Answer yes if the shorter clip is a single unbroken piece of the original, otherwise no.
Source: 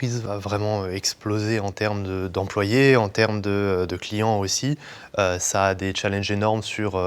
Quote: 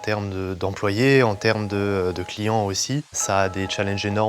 no